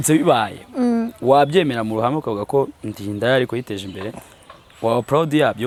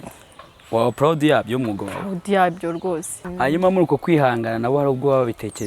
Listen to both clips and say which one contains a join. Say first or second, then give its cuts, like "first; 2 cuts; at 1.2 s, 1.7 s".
second; 1 cut; at 3.2 s